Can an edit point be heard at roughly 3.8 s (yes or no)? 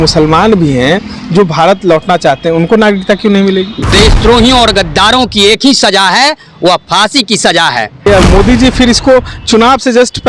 yes